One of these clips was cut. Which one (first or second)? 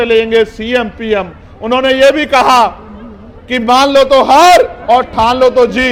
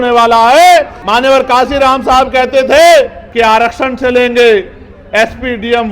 second